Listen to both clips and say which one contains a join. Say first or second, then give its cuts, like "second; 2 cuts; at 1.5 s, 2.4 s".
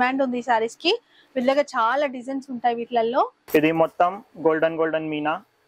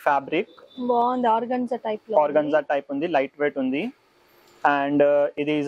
first; 1 cut; at 3.4 s